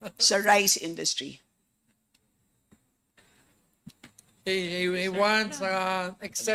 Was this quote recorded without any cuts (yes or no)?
yes